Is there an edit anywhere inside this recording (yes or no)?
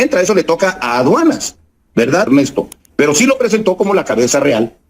yes